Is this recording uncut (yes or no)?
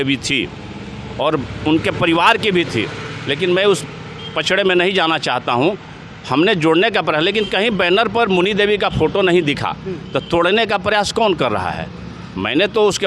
yes